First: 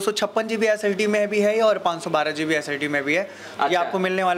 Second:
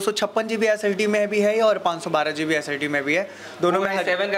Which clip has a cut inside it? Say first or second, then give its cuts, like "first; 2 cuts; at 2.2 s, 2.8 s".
first; 1 cut; at 3.5 s